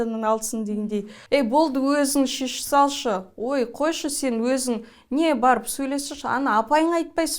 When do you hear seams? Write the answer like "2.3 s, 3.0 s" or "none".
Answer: 1.1 s